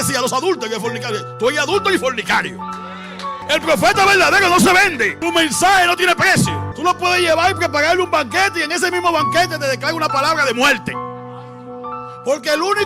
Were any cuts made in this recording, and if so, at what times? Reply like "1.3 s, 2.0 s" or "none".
3.4 s, 5.1 s, 6.7 s